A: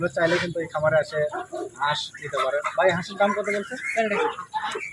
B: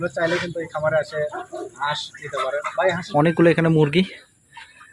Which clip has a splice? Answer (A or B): B